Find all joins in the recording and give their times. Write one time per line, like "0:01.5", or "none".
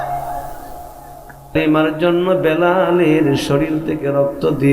0:01.5